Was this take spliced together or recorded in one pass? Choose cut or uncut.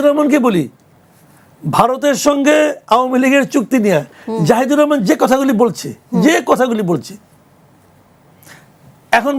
uncut